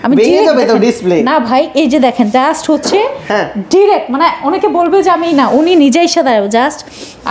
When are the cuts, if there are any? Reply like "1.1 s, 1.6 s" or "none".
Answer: none

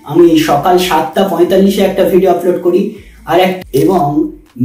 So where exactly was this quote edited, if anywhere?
3.6 s

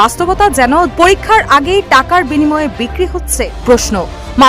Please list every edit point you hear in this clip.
0.9 s, 3.5 s

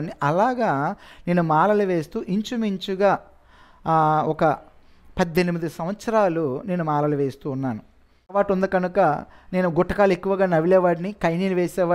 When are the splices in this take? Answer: 8.4 s

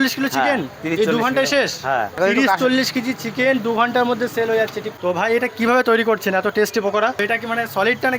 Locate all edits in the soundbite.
2.1 s, 4.8 s, 7.2 s

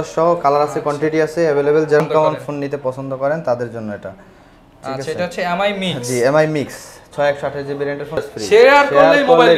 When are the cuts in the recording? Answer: 2.0 s, 8.3 s

